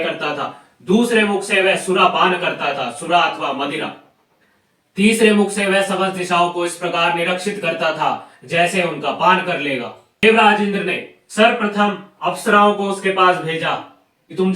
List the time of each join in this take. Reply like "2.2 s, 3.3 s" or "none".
10.2 s